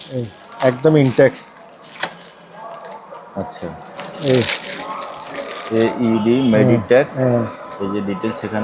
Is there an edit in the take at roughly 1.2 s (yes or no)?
no